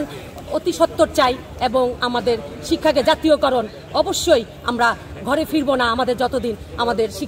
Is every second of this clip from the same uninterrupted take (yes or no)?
yes